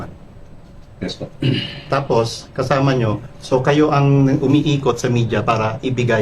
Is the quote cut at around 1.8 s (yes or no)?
yes